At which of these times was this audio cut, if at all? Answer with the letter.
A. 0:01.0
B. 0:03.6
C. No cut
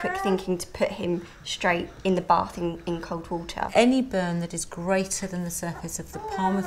B